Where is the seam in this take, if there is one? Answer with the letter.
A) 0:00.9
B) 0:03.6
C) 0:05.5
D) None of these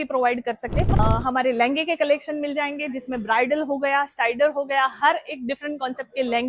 A